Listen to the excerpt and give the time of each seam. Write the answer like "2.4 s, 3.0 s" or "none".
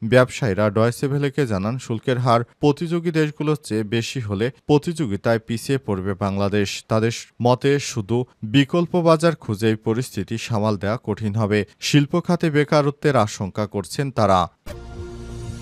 14.6 s

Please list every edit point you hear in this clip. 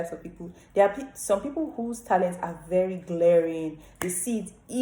none

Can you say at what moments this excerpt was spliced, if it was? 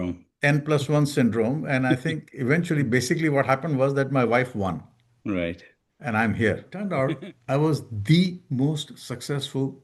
6.9 s

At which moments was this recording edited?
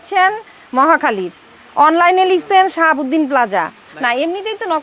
3.8 s

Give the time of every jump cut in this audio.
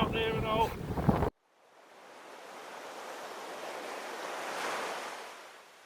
1.3 s

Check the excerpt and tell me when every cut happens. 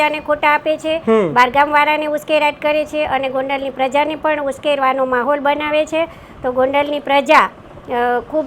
none

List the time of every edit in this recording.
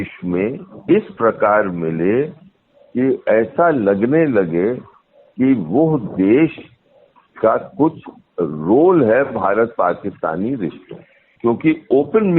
1.1 s

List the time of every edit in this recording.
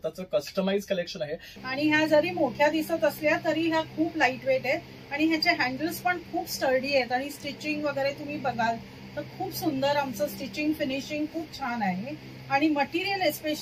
1.5 s

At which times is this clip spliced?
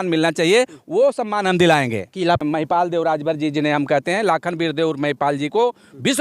2.4 s

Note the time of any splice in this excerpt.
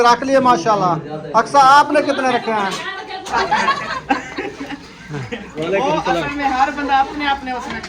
3.3 s, 5.5 s

